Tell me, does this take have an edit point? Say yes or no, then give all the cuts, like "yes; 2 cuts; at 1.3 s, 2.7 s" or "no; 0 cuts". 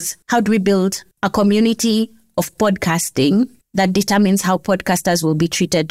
no; 0 cuts